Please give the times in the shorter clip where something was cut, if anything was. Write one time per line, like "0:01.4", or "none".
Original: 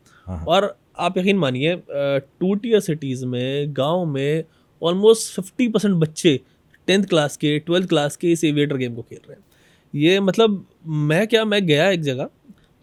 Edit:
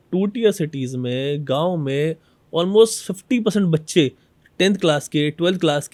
none